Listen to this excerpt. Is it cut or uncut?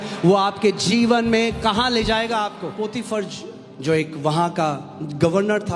cut